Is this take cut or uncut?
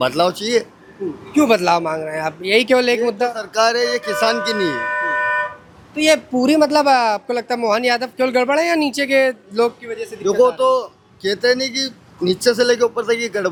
uncut